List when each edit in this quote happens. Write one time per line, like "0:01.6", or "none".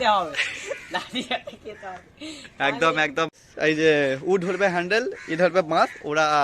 0:03.3